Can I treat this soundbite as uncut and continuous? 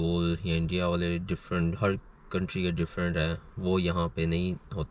yes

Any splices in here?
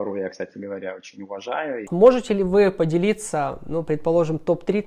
yes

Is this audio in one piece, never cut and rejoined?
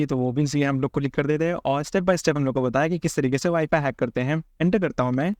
no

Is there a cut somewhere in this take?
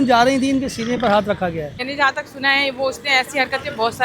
yes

